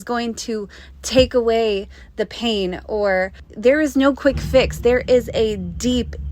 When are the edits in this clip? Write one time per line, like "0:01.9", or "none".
0:03.3